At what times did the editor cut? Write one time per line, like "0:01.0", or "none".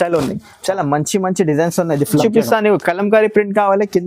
0:02.2